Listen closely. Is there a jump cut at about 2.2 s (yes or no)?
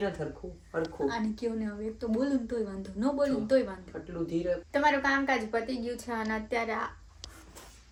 no